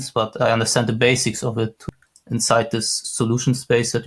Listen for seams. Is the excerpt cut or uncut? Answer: cut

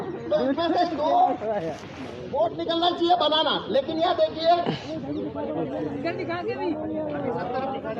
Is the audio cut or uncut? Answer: uncut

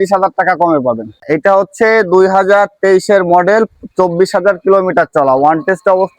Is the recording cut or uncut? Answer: cut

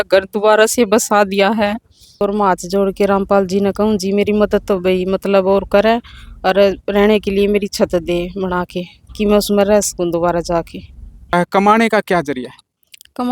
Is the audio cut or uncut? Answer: cut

